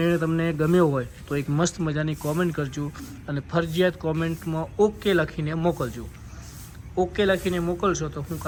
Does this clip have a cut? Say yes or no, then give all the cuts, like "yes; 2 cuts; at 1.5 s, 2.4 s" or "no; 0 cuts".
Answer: no; 0 cuts